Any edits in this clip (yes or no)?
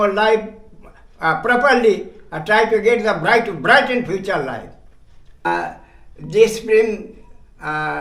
yes